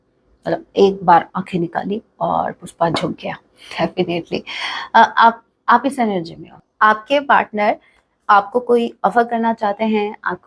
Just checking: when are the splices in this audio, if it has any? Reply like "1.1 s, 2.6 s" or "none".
6.6 s